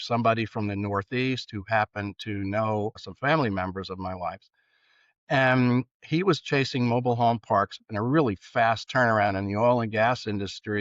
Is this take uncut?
no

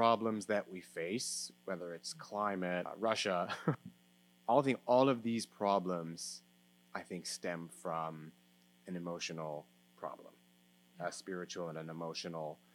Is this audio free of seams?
no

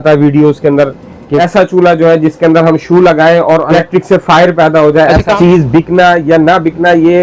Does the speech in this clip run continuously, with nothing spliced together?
no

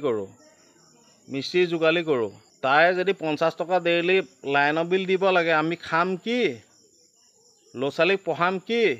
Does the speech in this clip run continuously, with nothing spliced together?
no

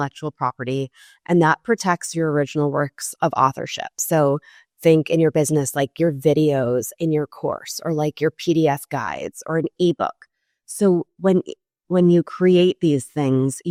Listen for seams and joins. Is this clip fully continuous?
yes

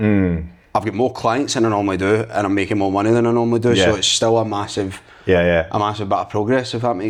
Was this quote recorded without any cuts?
yes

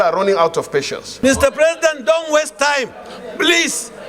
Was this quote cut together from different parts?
yes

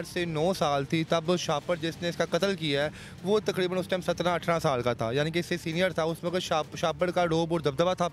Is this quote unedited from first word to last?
yes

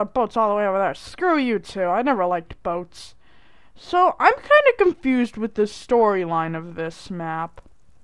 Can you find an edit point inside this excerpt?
yes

